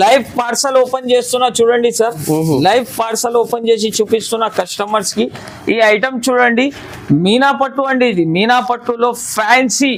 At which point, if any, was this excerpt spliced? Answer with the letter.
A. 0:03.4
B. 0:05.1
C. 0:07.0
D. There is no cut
D